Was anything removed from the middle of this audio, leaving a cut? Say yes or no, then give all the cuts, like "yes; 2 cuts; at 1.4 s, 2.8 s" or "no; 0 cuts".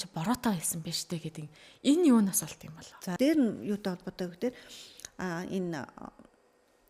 yes; 1 cut; at 3.1 s